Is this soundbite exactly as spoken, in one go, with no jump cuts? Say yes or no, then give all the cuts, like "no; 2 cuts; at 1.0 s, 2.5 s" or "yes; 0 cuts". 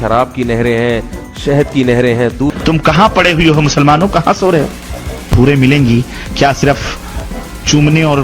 no; 2 cuts; at 2.6 s, 5.3 s